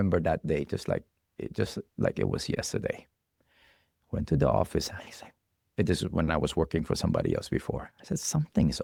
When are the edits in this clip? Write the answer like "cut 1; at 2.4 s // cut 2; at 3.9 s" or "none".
none